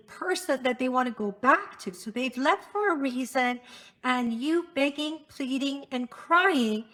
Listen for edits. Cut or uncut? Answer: uncut